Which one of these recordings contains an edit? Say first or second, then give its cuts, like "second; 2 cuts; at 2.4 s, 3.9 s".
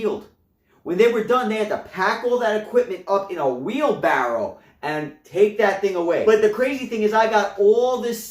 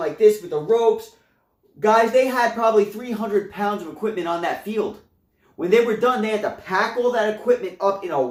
first; 1 cut; at 6.2 s